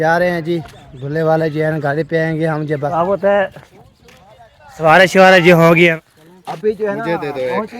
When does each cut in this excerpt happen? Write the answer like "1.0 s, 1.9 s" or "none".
2.9 s, 5.9 s